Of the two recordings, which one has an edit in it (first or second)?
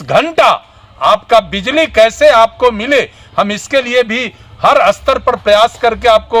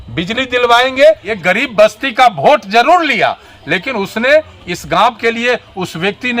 second